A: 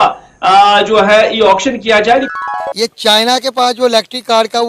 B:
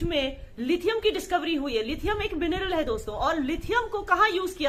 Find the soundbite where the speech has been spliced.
A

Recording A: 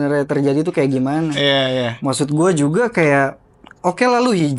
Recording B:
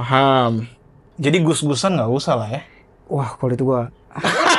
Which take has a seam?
B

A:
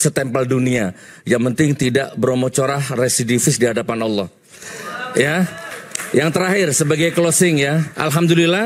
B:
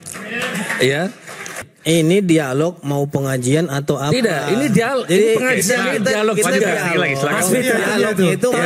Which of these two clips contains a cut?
B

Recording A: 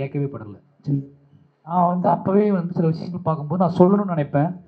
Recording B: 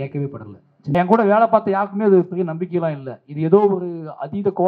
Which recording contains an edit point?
B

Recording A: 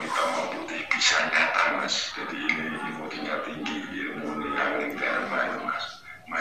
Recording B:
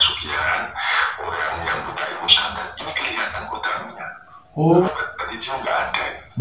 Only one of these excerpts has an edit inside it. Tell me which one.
B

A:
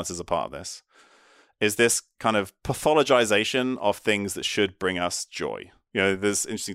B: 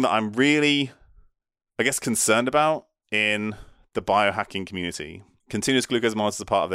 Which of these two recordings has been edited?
A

